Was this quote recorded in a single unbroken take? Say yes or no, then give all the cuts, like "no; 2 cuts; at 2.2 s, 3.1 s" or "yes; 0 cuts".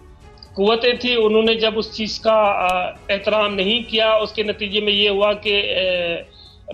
yes; 0 cuts